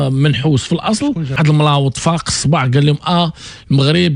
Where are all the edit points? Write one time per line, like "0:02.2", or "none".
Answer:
0:01.3